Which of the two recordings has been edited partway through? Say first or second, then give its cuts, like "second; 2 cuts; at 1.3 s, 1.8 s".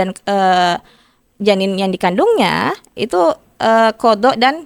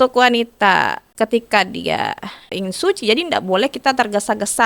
second; 2 cuts; at 1.0 s, 2.5 s